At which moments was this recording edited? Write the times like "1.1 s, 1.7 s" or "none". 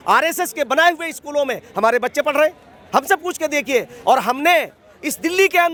none